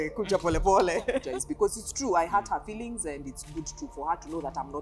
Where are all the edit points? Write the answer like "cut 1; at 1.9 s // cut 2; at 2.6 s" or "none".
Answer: cut 1; at 1.3 s